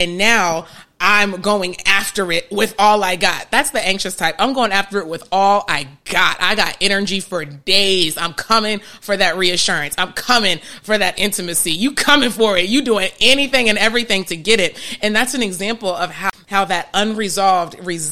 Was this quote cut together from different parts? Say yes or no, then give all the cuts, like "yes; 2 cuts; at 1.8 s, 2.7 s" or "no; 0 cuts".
yes; 1 cut; at 16.2 s